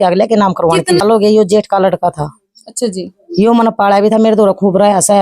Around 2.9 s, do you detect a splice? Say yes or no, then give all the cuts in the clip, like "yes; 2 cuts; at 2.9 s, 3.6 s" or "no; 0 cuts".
no; 1 cut; at 1.0 s